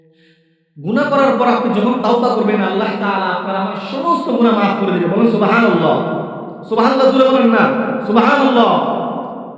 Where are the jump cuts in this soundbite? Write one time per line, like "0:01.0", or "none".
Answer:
0:05.2